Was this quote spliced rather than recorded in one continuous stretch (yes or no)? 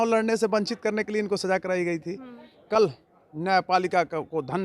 no